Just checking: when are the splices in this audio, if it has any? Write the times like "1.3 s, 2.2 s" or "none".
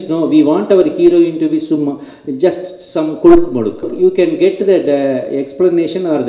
3.9 s

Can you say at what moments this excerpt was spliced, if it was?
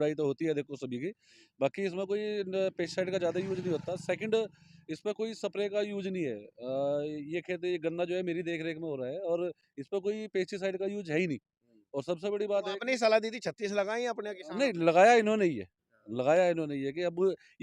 none

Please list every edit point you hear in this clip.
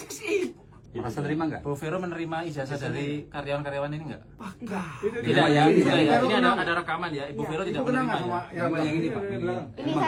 none

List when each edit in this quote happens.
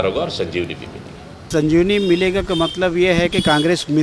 1.4 s

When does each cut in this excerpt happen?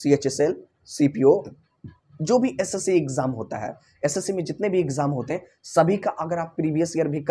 none

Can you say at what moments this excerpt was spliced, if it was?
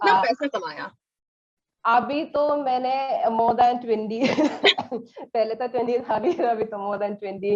none

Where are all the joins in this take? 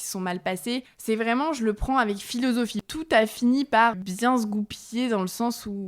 0.9 s, 2.8 s, 3.9 s

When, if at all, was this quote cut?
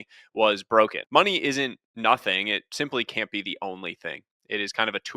1.0 s

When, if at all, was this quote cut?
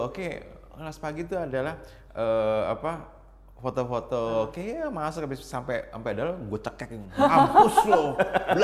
none

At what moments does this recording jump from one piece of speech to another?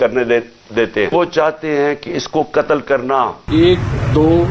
1.1 s, 3.5 s

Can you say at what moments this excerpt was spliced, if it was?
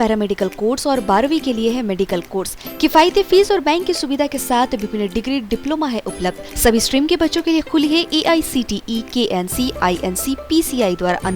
none

